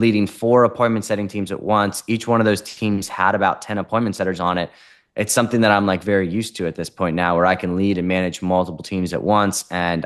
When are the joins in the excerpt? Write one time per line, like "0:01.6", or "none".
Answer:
none